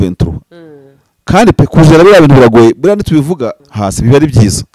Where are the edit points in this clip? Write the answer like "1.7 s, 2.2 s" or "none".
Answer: 3.6 s